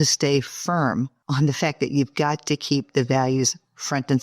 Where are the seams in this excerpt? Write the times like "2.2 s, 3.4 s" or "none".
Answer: 1.2 s